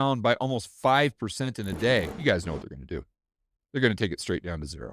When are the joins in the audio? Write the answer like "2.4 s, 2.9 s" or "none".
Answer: 2.1 s